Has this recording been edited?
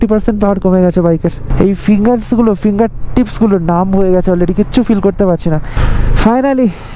yes; 2 cuts; at 1.4 s, 5.7 s

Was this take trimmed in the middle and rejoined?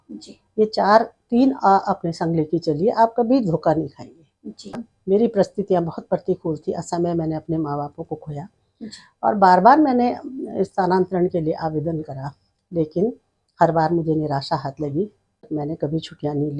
yes; 2 cuts; at 4.9 s, 15.7 s

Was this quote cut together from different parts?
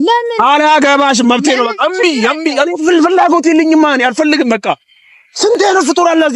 no; 0 cuts

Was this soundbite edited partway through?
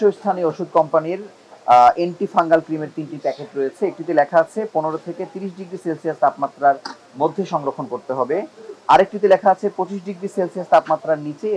no; 0 cuts

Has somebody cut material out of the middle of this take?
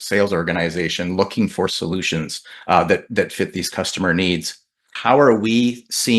yes; 1 cut; at 4.9 s

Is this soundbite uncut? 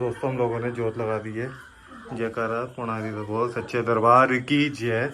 yes; 0 cuts

